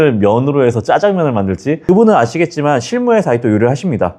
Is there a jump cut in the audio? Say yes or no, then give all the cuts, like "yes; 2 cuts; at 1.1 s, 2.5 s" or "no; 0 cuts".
no; 0 cuts